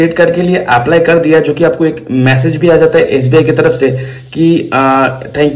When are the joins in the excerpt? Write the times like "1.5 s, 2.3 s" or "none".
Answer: none